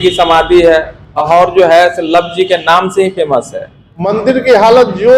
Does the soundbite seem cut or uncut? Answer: cut